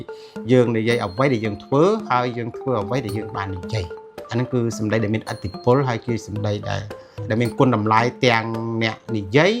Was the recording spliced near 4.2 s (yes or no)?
no